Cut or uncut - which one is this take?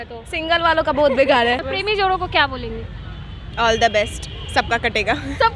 cut